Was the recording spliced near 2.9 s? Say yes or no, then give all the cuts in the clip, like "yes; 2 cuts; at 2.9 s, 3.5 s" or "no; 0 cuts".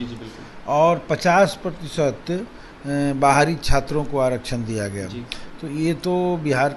no; 0 cuts